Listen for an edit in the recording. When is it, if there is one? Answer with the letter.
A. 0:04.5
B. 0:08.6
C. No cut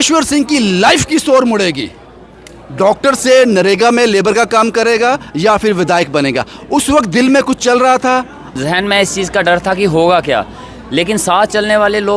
B